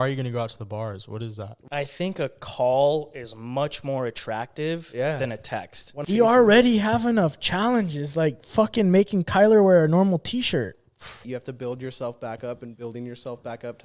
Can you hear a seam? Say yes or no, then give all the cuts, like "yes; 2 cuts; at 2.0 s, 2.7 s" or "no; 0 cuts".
yes; 3 cuts; at 1.5 s, 5.9 s, 11.2 s